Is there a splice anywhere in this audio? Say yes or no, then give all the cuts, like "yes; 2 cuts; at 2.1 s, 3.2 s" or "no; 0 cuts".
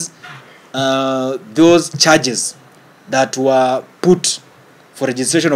no; 0 cuts